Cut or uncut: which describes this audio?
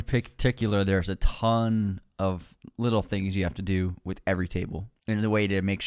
cut